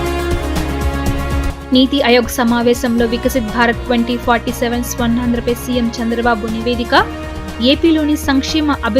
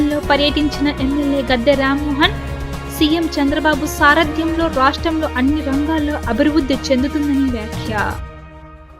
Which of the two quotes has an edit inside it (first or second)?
first